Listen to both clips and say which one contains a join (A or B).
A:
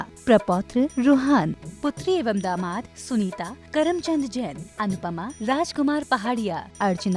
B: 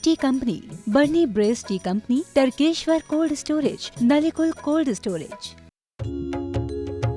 B